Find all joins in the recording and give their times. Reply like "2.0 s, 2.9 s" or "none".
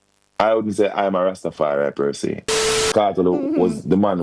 2.9 s